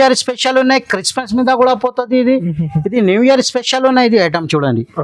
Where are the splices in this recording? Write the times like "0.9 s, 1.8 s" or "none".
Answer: none